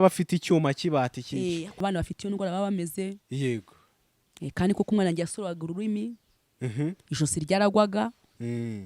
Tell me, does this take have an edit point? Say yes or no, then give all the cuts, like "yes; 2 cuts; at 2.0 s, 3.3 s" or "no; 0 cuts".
yes; 1 cut; at 1.8 s